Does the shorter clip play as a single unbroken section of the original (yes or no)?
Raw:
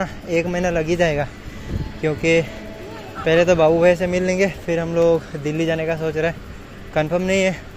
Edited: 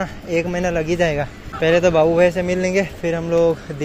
no